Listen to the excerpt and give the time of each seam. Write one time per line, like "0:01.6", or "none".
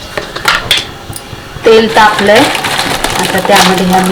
none